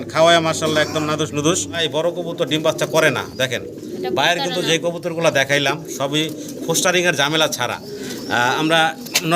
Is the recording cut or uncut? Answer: cut